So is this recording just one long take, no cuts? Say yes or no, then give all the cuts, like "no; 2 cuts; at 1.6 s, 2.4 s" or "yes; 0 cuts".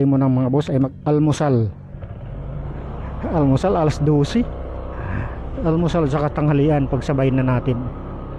no; 1 cut; at 0.9 s